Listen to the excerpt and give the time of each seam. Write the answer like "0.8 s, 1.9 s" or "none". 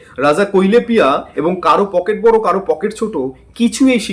none